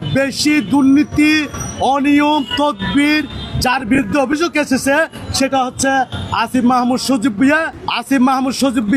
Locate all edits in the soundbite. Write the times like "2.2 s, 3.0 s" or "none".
7.8 s